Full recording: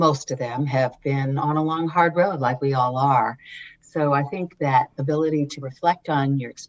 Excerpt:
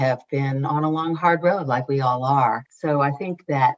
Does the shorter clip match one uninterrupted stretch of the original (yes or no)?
no